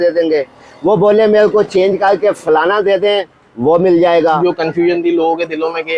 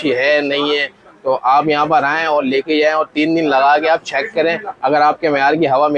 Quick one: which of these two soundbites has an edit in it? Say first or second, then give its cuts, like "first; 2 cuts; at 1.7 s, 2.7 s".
first; 1 cut; at 4.4 s